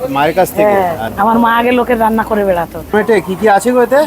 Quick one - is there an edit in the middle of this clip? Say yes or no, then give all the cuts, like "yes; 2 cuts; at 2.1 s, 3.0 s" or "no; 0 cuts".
yes; 2 cuts; at 1.1 s, 2.9 s